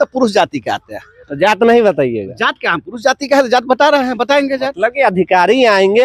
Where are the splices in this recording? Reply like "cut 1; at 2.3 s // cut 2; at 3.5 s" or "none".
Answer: none